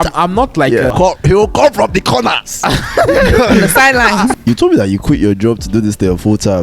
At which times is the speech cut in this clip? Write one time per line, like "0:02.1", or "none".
0:00.9
0:04.4